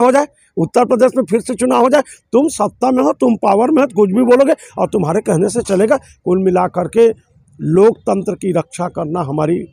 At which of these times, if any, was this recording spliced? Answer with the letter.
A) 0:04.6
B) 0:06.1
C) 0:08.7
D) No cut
D